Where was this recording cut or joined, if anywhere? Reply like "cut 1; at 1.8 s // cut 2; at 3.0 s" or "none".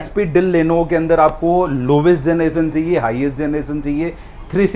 none

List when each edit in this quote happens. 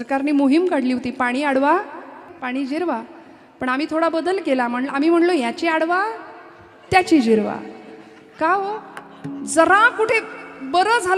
cut 1; at 2.3 s

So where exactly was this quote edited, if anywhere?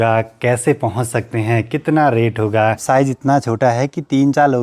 cut 1; at 2.8 s

